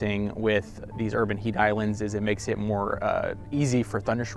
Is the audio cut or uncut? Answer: uncut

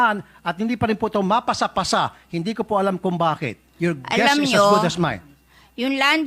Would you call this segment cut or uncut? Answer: uncut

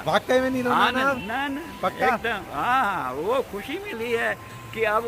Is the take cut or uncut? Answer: uncut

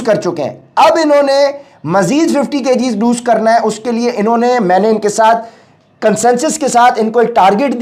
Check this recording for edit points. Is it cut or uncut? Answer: uncut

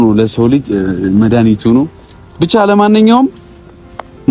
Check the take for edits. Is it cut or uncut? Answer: uncut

